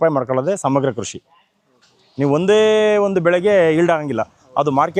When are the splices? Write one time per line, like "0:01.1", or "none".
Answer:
none